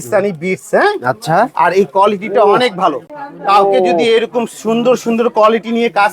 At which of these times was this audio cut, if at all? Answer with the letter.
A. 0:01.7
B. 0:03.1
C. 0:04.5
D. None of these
D